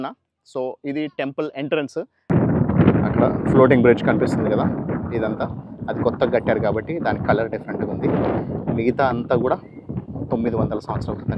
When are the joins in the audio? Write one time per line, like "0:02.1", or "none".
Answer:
0:02.1